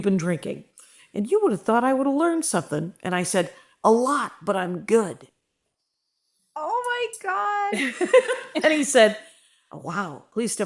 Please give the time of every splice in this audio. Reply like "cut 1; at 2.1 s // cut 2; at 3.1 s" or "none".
none